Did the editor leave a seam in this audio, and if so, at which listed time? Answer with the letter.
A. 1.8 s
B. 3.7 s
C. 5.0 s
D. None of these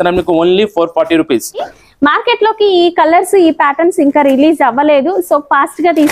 A